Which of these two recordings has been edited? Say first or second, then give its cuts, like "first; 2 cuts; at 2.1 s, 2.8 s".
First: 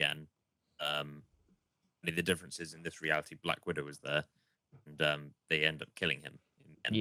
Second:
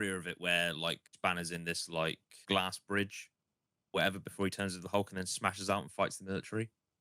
second; 2 cuts; at 1.1 s, 2.4 s